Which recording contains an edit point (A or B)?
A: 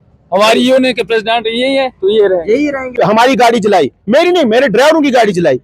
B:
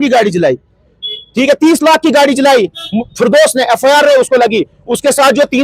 A